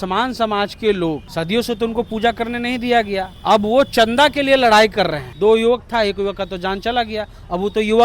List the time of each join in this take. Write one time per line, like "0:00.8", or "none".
0:01.3
0:03.3
0:05.2